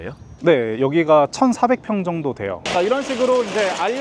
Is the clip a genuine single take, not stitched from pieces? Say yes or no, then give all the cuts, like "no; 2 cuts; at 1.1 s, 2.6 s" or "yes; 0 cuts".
no; 1 cut; at 2.6 s